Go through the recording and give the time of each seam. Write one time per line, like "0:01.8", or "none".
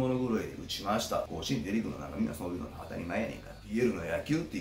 0:01.3
0:03.7